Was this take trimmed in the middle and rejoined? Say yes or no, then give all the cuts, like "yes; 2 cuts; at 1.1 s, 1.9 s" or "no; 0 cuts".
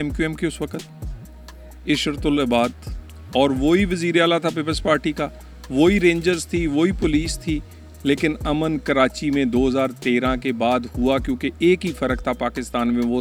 no; 0 cuts